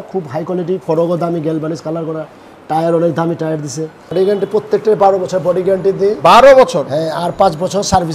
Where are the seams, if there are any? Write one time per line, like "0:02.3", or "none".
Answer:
0:04.0